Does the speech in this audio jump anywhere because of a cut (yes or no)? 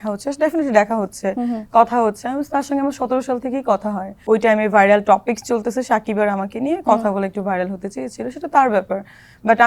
yes